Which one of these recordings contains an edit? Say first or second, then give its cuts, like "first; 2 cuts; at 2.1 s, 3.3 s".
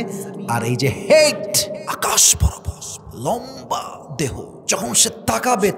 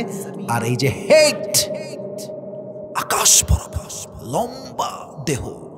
first; 2 cuts; at 1.8 s, 4.5 s